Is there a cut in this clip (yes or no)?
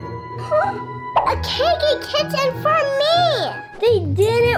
no